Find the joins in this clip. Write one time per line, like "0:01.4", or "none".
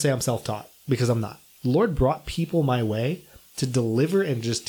0:01.4